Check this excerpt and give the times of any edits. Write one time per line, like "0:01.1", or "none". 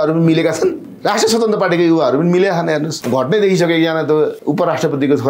0:00.9
0:03.0
0:04.4

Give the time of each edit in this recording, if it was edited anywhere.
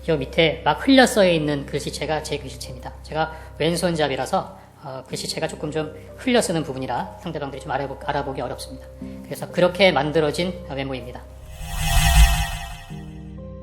0:11.4
0:12.8

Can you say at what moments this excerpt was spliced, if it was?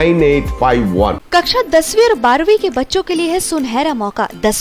0:01.2

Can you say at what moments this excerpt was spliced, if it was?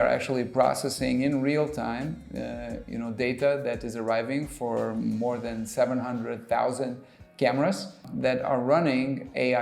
0:08.1

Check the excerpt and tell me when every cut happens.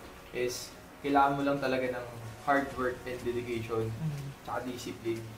none

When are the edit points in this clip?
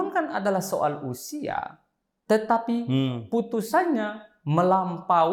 none

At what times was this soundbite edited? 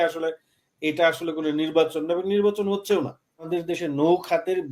0:03.5

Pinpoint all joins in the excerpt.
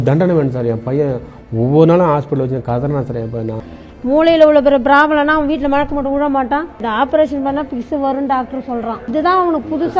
0:03.6
0:06.8
0:09.1

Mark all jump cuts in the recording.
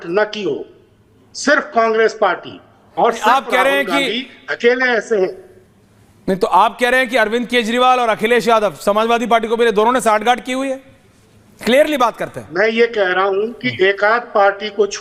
none

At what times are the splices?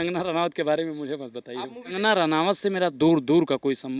0:01.9

